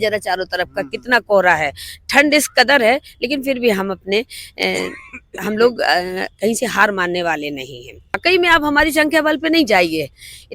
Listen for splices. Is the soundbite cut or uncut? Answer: cut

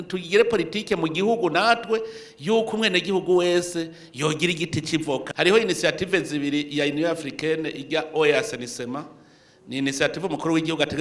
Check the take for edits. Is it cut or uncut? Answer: cut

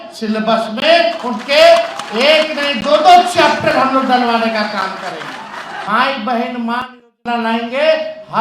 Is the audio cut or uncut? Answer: cut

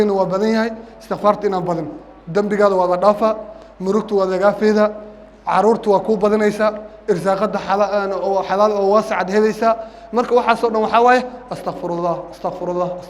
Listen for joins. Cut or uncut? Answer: uncut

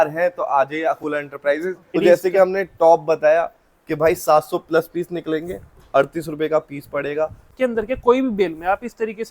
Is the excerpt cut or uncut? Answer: cut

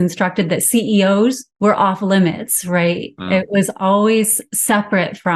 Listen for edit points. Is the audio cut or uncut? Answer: cut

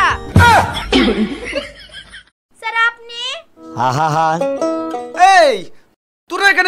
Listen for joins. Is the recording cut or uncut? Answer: uncut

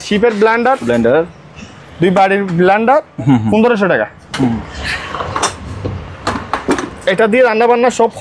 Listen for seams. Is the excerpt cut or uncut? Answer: cut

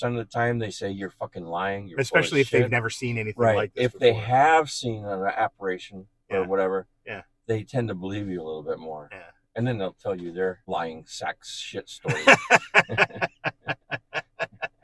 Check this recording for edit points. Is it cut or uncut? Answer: cut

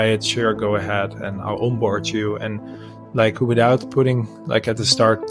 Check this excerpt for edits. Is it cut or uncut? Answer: uncut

